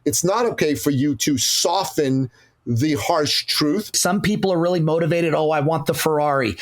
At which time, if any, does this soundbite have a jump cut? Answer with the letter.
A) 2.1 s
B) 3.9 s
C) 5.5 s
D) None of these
B